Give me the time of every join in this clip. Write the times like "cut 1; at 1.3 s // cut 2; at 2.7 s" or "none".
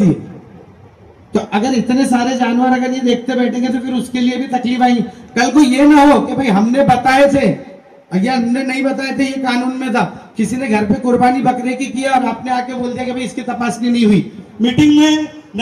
cut 1; at 14.4 s

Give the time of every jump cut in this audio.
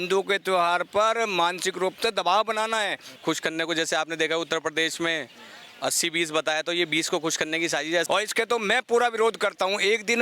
cut 1; at 3.1 s // cut 2; at 8.0 s

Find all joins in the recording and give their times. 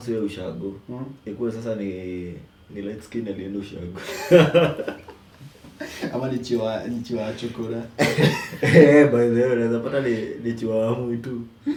none

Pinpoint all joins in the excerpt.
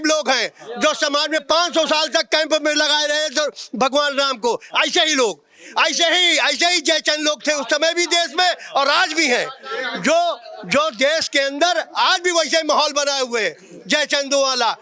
none

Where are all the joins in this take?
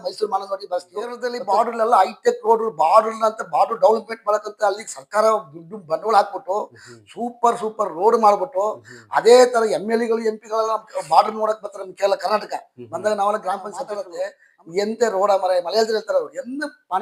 cut 1; at 1.3 s // cut 2; at 14.0 s

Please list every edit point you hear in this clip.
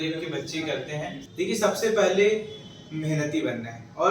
cut 1; at 1.2 s

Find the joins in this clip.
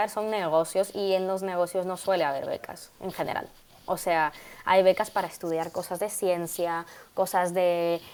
none

